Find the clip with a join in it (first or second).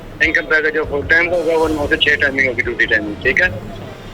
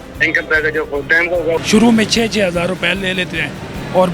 second